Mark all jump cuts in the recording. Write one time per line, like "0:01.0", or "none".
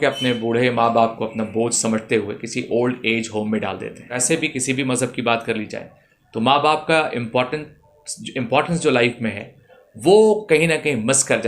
0:04.2